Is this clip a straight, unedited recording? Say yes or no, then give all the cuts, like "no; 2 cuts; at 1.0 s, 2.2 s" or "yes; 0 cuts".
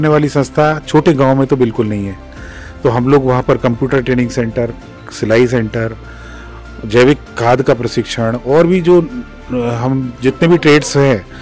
yes; 0 cuts